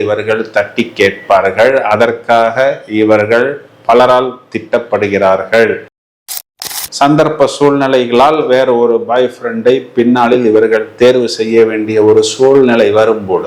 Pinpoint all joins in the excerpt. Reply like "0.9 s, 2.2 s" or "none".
6.4 s